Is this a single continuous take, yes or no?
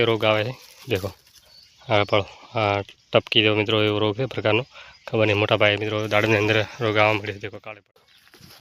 no